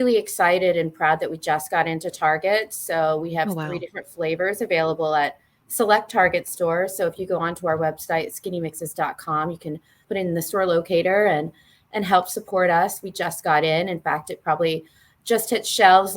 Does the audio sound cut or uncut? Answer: cut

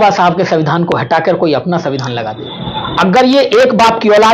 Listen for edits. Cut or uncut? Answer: cut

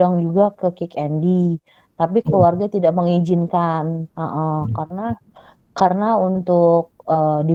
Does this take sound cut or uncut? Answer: uncut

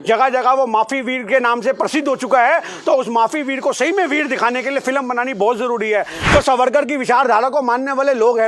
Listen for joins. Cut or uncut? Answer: cut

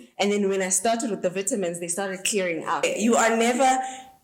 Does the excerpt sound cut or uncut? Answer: cut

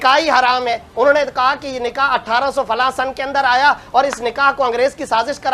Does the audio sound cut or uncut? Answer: uncut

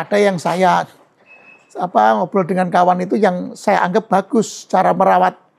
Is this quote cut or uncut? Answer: uncut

